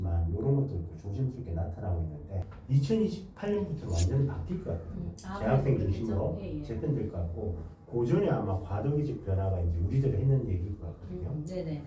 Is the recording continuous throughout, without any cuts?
no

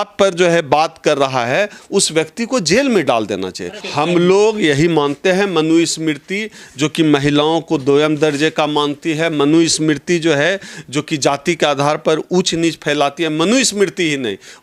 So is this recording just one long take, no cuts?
no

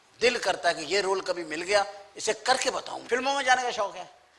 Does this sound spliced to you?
yes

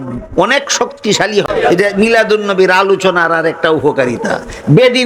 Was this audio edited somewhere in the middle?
yes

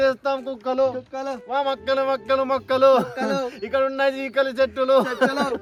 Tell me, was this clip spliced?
no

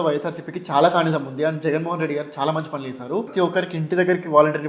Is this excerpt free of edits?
no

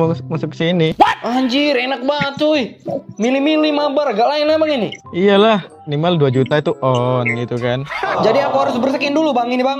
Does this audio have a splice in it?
yes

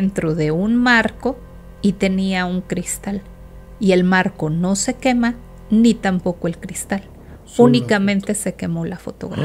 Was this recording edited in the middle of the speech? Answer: no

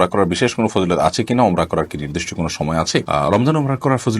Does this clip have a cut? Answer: no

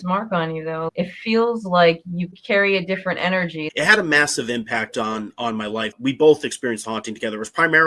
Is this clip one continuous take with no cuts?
no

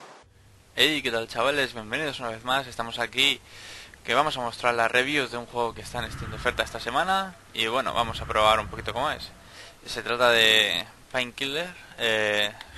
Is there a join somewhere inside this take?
no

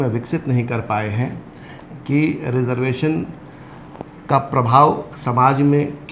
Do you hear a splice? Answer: no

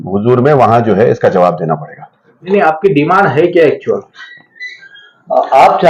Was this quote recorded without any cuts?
yes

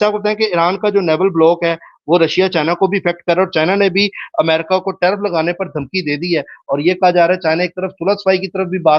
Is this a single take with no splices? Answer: yes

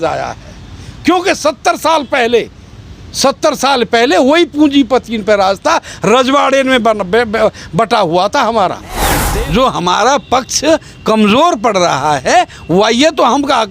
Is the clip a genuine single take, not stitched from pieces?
no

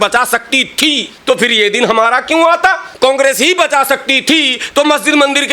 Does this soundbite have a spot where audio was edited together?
yes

